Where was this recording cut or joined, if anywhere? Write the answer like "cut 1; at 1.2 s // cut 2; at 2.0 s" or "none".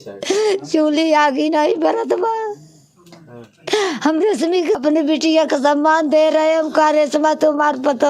cut 1; at 4.8 s